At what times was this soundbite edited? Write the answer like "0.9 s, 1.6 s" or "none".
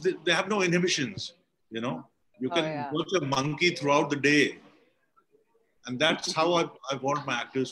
2.2 s